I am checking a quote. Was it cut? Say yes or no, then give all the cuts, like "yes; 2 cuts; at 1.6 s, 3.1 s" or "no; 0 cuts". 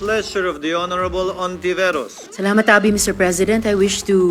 no; 0 cuts